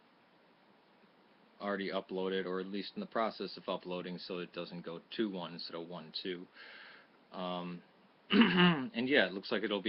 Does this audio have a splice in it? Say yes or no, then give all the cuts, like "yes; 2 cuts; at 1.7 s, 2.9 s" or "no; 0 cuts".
no; 0 cuts